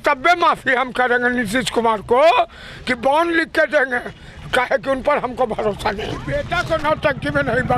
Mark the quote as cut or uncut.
cut